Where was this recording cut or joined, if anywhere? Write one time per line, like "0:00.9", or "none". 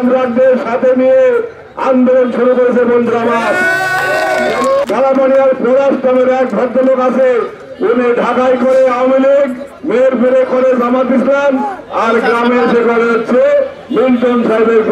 0:04.8

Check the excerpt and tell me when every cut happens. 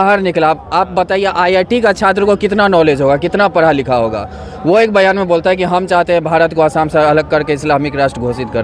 none

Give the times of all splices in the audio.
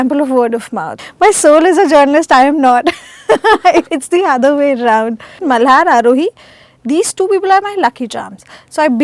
0:01.0
0:03.9
0:05.4

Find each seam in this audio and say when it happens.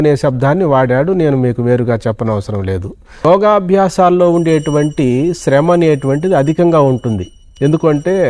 0:03.2

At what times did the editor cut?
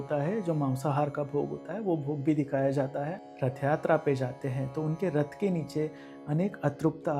0:03.2

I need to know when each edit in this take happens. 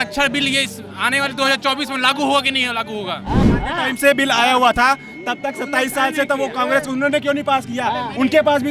0:03.4

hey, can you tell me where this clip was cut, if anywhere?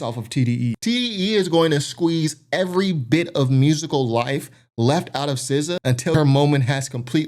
0:00.8
0:05.9

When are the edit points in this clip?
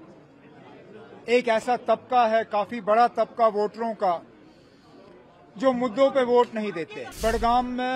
0:07.0

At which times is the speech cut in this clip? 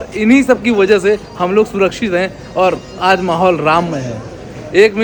none

